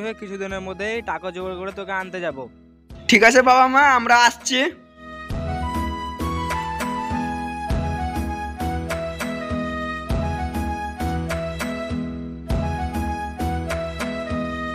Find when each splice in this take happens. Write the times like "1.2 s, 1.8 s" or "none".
none